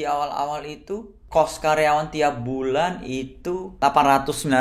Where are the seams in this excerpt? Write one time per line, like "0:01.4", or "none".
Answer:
0:01.2
0:03.7